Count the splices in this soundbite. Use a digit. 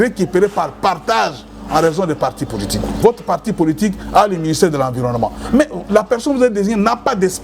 1